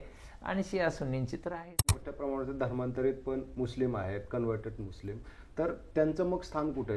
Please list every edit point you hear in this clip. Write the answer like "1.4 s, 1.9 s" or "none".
2.1 s